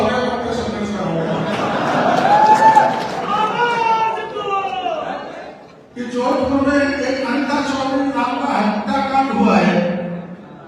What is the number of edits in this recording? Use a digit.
1